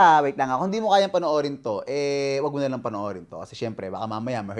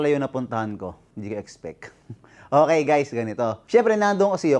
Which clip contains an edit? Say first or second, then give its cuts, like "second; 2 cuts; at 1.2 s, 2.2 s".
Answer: second; 2 cuts; at 1.0 s, 3.5 s